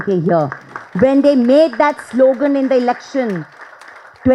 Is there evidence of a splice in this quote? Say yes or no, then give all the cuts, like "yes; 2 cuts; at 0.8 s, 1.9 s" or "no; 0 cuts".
no; 0 cuts